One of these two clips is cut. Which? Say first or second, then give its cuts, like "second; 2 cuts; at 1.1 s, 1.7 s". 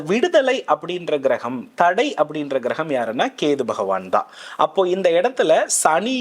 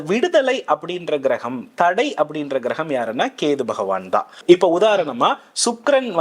second; 1 cut; at 4.4 s